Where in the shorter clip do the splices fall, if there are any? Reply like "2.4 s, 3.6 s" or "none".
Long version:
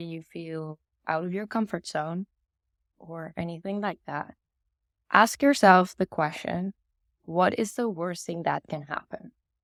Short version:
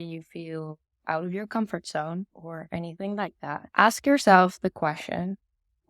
2.4 s, 3.7 s